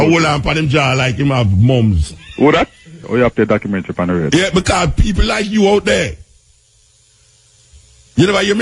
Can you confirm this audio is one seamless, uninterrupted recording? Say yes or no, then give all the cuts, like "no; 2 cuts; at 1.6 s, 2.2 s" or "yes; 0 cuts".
no; 1 cut; at 3.0 s